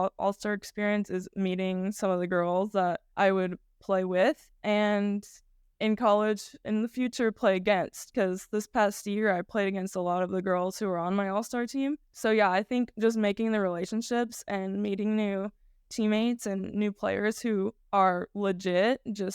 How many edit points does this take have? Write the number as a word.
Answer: four